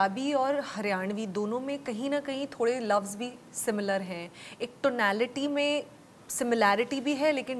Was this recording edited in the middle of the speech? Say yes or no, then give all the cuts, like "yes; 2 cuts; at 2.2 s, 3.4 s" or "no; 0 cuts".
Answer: no; 0 cuts